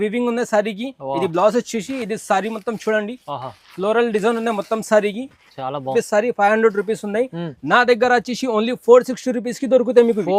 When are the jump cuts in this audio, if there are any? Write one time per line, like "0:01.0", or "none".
0:05.9